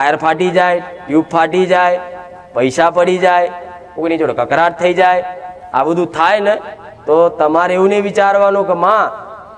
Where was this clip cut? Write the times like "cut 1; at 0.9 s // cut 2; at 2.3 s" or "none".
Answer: none